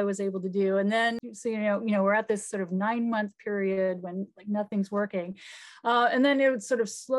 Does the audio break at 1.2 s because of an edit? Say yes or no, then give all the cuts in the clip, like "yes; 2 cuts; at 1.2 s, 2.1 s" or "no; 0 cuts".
yes; 1 cut; at 1.2 s